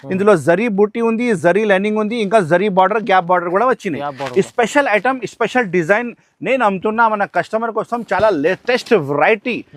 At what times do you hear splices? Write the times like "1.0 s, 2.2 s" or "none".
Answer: none